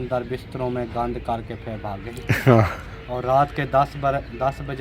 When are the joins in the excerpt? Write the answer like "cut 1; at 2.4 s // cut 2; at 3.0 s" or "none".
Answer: none